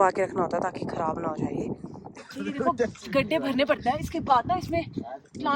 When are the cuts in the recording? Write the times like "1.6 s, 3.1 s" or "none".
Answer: 2.1 s